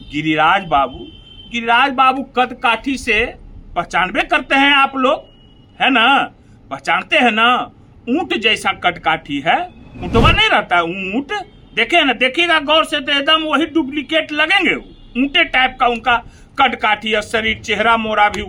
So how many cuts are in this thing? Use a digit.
0